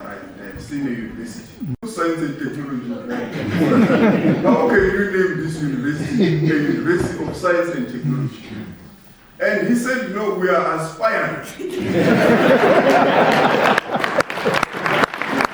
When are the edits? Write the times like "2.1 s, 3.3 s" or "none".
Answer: 1.8 s